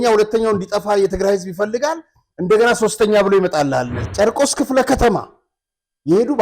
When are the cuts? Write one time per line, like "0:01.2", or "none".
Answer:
0:04.0